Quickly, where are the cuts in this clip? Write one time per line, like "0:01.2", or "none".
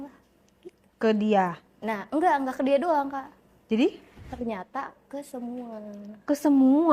0:04.3